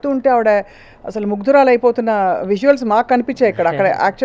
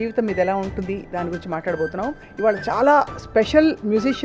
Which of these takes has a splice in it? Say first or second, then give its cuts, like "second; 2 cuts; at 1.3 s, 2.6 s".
second; 1 cut; at 2.2 s